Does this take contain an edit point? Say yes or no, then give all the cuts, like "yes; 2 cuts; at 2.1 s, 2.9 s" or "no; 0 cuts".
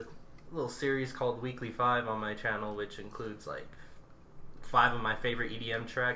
yes; 1 cut; at 4.0 s